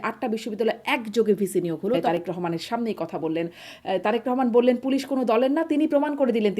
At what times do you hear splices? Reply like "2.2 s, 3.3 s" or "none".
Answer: 2.0 s